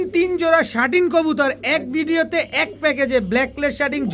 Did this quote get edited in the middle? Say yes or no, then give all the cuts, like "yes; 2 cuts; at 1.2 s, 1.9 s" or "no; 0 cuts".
no; 0 cuts